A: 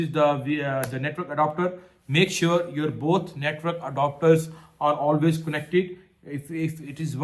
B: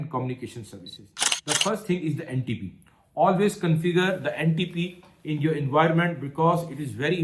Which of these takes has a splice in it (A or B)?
B